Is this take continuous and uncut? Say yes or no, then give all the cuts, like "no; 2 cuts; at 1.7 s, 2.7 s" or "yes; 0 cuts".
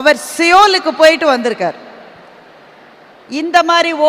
yes; 0 cuts